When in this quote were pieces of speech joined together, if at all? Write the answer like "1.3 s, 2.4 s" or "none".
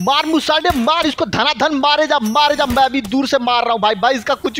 none

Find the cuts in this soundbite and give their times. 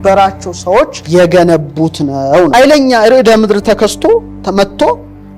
1.0 s, 2.5 s

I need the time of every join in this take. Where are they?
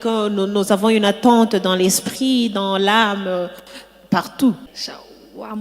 4.7 s

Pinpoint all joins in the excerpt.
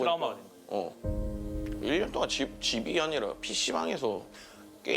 0.9 s

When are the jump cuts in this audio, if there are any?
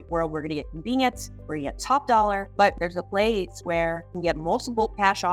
4.1 s

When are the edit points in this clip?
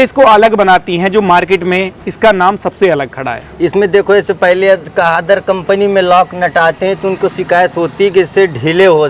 none

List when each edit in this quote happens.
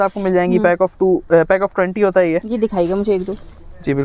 none

